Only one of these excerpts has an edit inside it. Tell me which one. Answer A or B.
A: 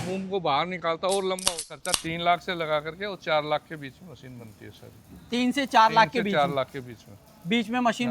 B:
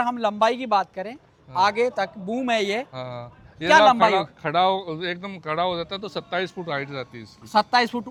A